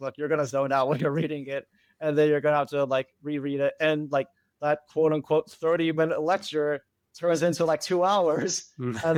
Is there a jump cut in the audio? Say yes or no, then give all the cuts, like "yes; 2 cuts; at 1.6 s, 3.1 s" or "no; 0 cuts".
no; 0 cuts